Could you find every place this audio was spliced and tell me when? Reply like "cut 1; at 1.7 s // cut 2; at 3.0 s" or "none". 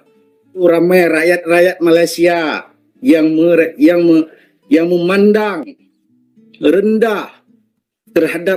none